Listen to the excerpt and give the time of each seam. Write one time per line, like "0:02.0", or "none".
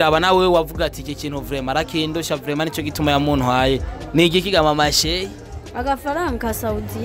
none